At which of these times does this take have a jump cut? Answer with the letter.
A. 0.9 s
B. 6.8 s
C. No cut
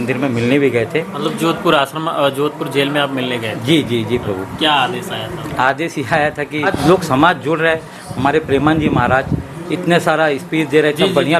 B